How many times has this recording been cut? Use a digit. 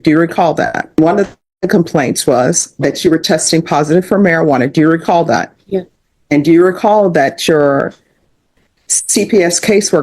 1